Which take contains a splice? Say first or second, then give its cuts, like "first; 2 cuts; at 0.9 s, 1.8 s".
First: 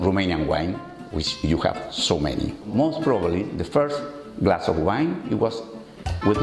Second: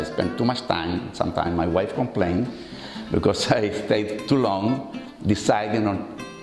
first; 1 cut; at 2.7 s